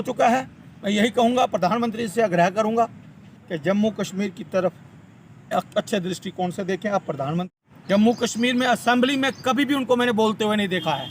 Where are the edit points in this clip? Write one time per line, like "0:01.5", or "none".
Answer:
0:07.5